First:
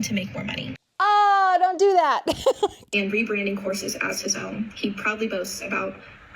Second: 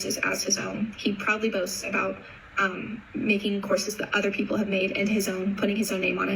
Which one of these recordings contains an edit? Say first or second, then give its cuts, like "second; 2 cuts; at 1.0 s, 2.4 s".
first; 1 cut; at 2.8 s